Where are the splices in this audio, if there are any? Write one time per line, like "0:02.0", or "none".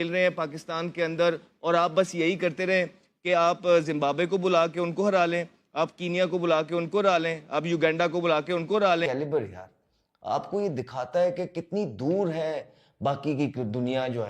0:09.0